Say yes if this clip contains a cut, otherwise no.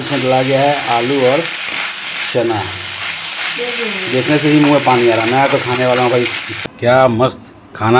yes